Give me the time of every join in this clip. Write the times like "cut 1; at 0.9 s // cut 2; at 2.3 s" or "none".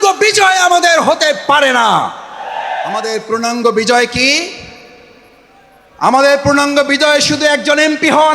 cut 1; at 3.1 s